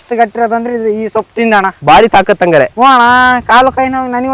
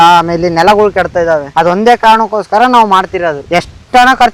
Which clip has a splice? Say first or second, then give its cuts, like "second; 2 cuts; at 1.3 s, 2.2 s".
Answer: first; 1 cut; at 1.8 s